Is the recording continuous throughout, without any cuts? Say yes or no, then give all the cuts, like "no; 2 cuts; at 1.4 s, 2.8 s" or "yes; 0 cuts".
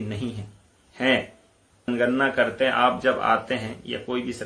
no; 1 cut; at 1.9 s